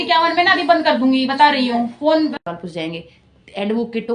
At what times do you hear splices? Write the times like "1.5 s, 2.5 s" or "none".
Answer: 2.4 s